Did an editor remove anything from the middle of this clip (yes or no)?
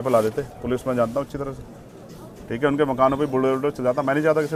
no